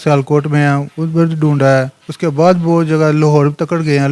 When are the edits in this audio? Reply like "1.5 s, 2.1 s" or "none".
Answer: none